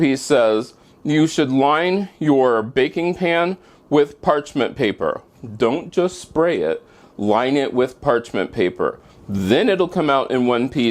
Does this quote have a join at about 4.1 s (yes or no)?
no